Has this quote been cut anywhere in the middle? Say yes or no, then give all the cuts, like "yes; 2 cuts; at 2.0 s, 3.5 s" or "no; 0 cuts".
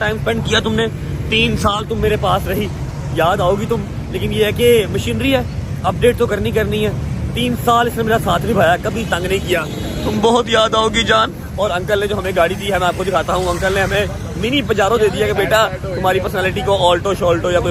no; 0 cuts